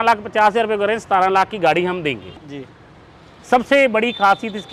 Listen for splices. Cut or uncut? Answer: cut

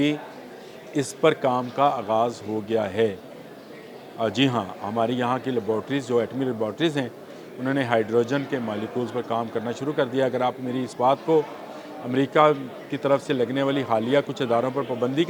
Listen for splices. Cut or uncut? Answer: uncut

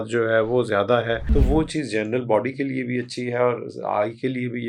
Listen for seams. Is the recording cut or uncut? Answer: cut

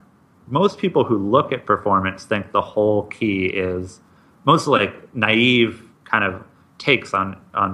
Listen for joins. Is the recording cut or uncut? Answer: uncut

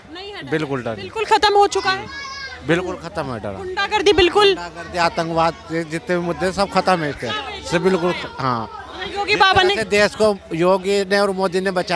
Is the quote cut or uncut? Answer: uncut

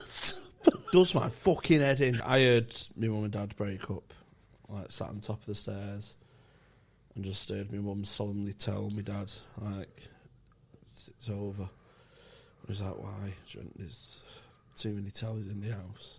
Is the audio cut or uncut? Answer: cut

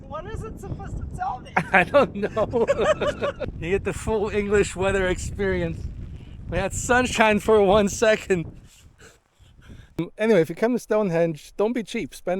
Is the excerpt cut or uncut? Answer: cut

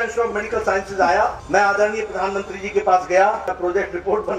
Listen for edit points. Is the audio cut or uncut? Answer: cut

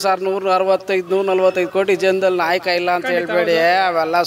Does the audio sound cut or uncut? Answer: uncut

